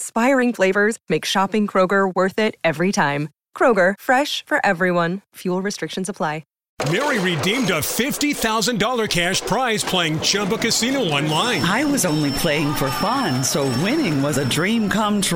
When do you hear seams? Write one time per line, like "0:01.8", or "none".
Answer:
0:06.6